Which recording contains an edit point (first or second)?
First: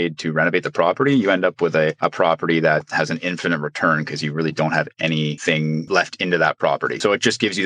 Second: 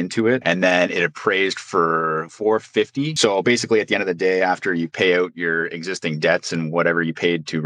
second